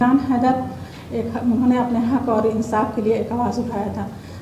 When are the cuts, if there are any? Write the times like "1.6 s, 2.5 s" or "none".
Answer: none

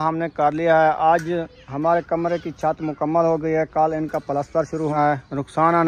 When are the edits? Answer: 4.9 s

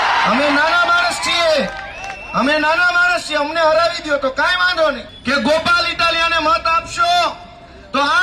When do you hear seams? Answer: 5.1 s

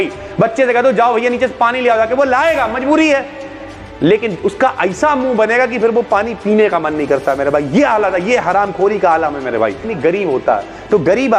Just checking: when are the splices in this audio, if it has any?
9.9 s

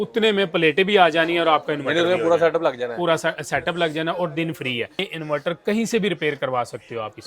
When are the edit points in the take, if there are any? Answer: 5.1 s

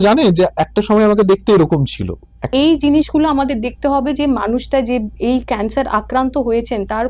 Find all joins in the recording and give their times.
2.5 s

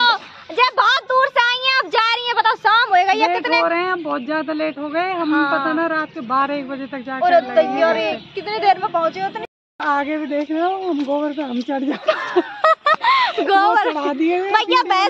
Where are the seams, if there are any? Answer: 9.4 s

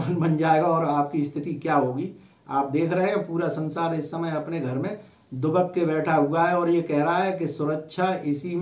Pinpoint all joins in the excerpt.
none

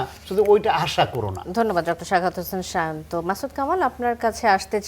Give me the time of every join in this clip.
none

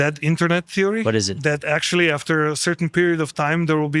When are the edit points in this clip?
1.3 s

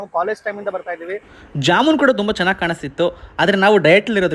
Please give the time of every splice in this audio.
1.4 s

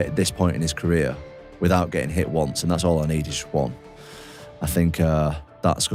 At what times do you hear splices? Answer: none

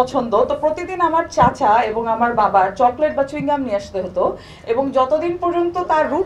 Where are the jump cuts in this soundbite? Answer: none

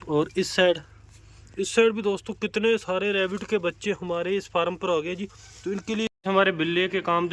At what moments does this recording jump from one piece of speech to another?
6.1 s

